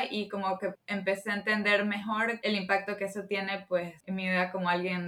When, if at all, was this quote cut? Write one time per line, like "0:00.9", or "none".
0:00.8
0:02.4
0:04.0